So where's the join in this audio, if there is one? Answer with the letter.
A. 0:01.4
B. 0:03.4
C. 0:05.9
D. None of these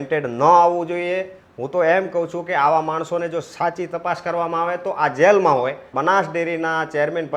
C